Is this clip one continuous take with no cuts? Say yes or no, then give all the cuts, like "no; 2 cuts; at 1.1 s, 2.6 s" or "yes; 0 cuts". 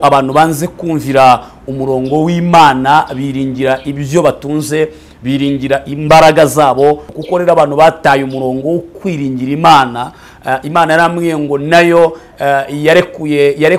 no; 1 cut; at 7.1 s